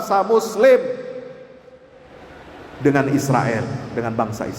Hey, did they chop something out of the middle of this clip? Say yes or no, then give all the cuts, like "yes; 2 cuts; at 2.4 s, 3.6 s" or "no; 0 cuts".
no; 0 cuts